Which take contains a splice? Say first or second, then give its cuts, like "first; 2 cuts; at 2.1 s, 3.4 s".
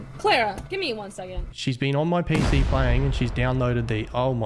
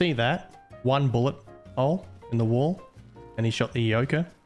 first; 1 cut; at 1.5 s